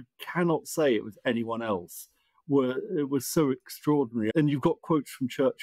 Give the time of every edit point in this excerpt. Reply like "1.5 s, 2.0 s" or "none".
4.3 s